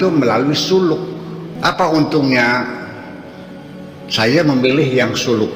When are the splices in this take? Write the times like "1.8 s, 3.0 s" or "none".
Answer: 1.5 s